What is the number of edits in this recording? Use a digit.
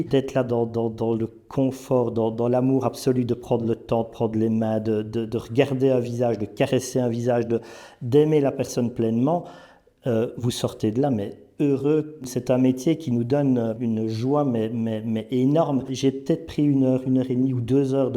2